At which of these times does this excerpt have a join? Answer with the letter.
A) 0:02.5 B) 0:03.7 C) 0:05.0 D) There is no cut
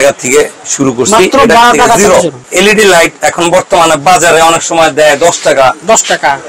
A